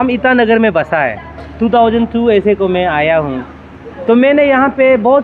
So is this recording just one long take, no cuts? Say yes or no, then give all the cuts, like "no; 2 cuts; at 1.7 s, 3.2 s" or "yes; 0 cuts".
yes; 0 cuts